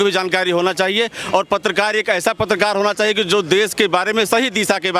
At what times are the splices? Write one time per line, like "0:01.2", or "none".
none